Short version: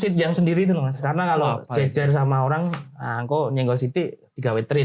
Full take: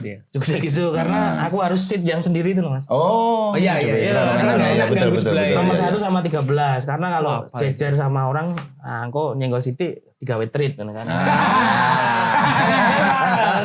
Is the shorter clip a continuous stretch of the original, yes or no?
no